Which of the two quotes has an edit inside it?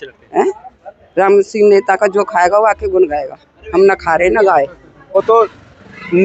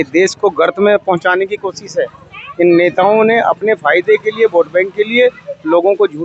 first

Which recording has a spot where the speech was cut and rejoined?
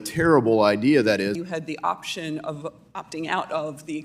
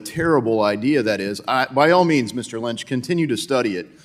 first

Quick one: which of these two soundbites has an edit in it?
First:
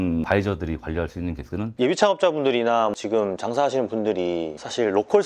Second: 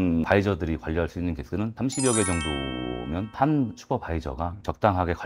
first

